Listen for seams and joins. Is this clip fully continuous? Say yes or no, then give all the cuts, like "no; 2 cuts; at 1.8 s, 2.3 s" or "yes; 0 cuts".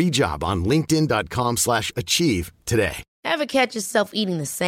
no; 1 cut; at 3.1 s